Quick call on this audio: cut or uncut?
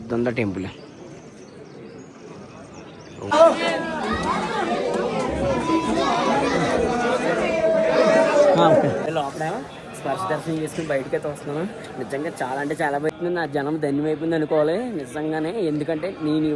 cut